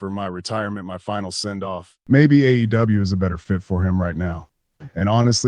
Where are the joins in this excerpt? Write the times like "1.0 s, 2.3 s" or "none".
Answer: 1.9 s